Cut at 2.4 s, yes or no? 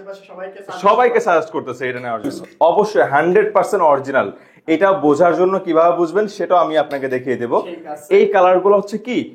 yes